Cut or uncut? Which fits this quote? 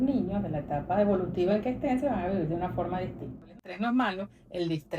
cut